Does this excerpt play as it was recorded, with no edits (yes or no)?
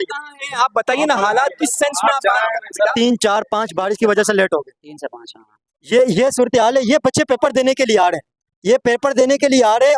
no